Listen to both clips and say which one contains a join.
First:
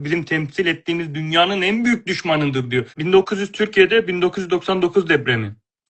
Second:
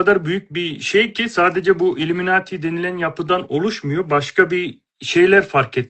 first; 1 cut; at 2.9 s

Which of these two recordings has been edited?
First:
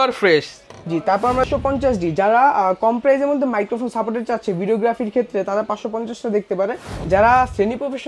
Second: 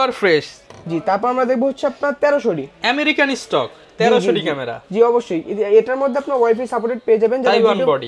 first; 2 cuts; at 1.5 s, 6.9 s

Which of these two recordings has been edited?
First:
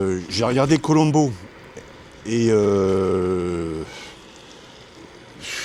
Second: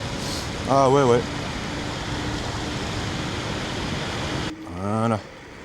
second; 1 cut; at 4.5 s

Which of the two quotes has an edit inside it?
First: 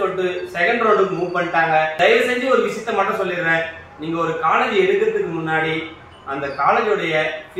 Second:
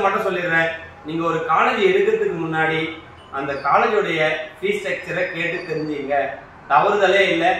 first; 1 cut; at 1.4 s

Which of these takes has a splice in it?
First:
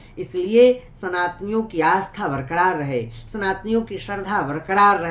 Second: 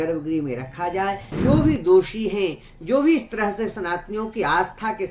second; 1 cut; at 1.3 s

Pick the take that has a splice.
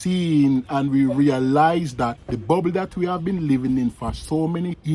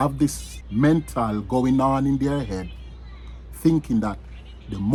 first; 1 cut; at 2.3 s

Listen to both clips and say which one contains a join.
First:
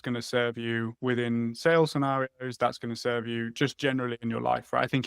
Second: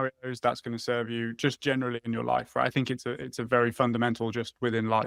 first; 1 cut; at 0.9 s

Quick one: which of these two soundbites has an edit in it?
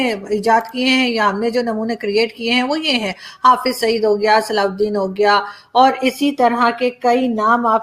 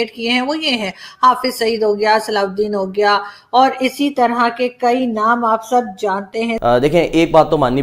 second; 1 cut; at 6.5 s

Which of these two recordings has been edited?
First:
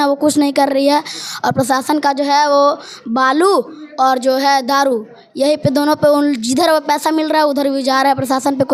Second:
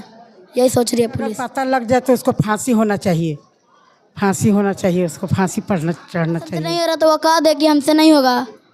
second; 2 cuts; at 1.5 s, 6.7 s

